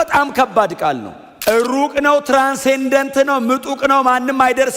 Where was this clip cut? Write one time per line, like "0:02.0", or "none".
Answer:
0:01.2